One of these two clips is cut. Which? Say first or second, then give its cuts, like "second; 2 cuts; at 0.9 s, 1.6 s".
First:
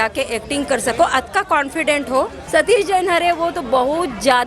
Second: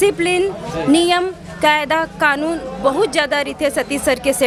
first; 1 cut; at 2.4 s